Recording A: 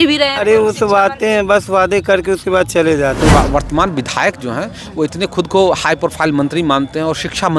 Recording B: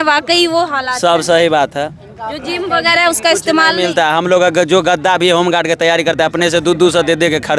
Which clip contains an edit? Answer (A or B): A